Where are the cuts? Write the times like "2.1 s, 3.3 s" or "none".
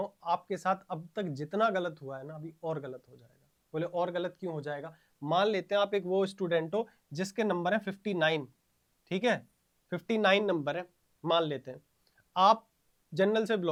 none